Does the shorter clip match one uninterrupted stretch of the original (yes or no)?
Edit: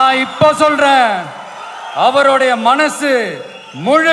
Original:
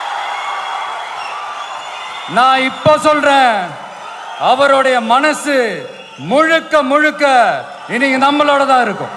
yes